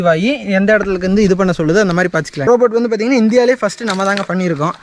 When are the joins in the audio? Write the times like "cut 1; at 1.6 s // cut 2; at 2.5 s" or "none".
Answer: cut 1; at 2.5 s